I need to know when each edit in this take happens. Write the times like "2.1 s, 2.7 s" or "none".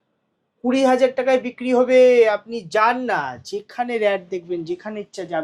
none